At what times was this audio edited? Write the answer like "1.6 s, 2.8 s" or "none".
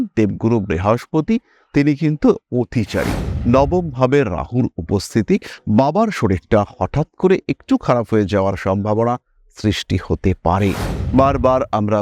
3.3 s, 10.9 s